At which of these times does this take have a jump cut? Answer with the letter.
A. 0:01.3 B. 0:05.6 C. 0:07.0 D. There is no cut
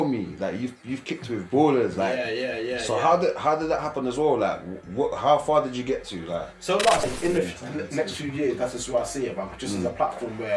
C